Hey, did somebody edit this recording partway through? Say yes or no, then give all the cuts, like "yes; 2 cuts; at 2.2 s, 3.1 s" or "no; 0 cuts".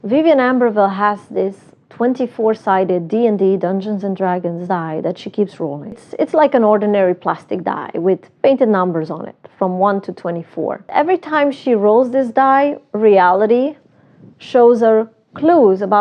yes; 2 cuts; at 6.0 s, 10.9 s